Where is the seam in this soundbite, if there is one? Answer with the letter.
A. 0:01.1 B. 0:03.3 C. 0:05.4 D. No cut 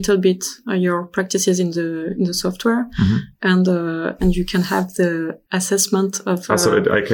C